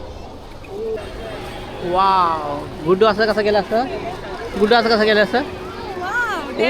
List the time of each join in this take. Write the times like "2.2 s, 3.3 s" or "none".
1.0 s